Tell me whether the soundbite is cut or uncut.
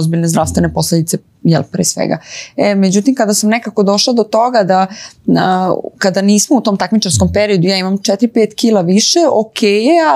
uncut